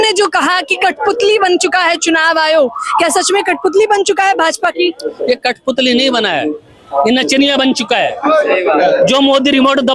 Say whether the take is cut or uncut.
uncut